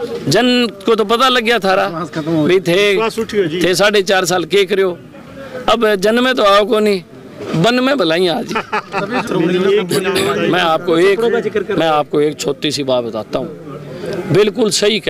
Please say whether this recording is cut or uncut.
uncut